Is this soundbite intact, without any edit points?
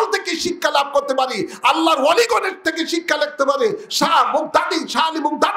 yes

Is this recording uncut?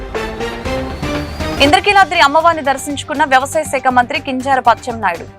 yes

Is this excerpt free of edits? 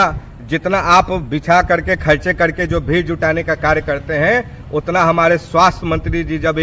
yes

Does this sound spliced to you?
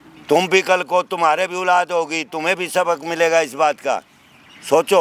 no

